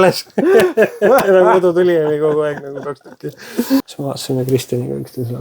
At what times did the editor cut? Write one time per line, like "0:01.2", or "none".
0:03.9

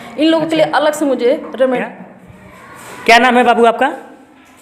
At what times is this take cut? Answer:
0:01.8

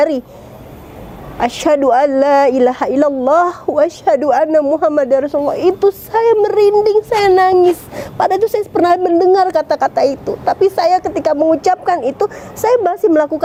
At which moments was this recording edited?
none

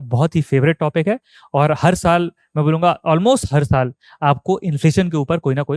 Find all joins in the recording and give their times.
none

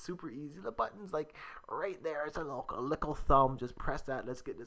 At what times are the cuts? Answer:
none

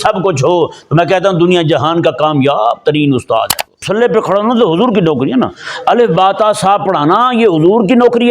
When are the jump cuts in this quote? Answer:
0:03.9

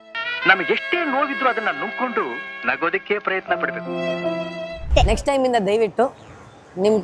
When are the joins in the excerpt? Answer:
0:04.6

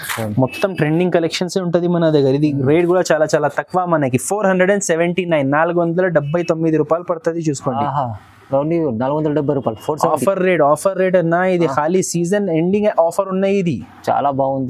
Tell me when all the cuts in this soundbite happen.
none

